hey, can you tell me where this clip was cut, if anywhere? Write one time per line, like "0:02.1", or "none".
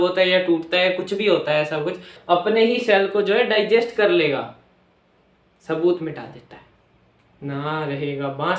0:02.1